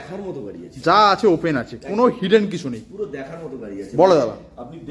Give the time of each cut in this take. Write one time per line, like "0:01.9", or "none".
none